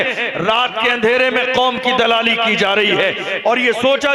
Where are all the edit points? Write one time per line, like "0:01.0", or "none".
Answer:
none